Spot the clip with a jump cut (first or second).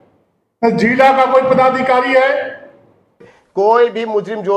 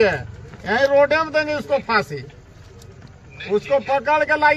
first